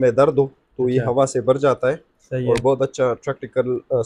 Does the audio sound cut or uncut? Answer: uncut